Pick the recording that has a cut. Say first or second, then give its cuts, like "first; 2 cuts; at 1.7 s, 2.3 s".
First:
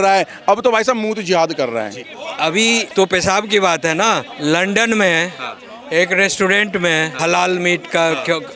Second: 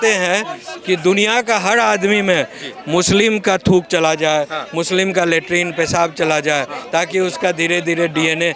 first; 3 cuts; at 2.4 s, 4.3 s, 7.2 s